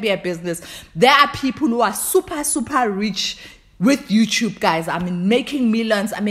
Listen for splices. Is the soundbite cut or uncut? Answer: uncut